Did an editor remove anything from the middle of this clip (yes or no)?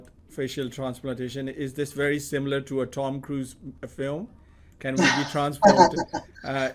no